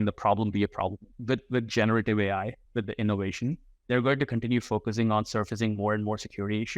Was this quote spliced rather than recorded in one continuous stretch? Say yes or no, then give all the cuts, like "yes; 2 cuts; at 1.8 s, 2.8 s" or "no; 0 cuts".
yes; 3 cuts; at 1.1 s, 2.6 s, 3.7 s